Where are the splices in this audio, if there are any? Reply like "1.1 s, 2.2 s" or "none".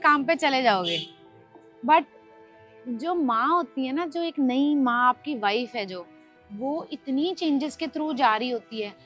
none